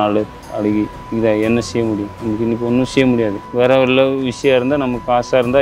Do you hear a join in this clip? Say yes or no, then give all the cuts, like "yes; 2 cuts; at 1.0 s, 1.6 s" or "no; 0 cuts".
yes; 3 cuts; at 1.0 s, 2.1 s, 3.4 s